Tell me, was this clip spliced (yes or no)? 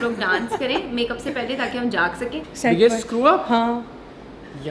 yes